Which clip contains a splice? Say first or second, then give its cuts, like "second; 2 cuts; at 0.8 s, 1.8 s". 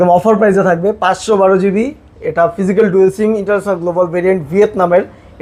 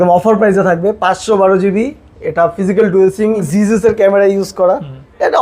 second; 1 cut; at 3.4 s